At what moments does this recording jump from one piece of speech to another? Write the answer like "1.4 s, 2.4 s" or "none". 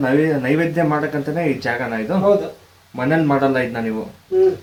none